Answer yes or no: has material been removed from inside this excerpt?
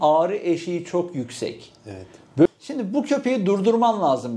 yes